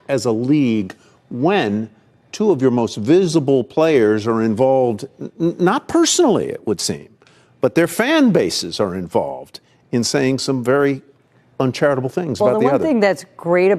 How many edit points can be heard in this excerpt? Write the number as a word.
one